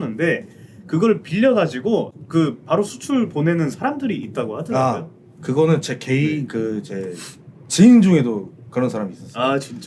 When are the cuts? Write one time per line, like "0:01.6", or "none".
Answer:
0:02.2